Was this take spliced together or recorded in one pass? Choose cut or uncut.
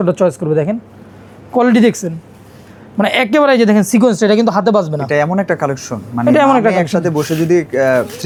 uncut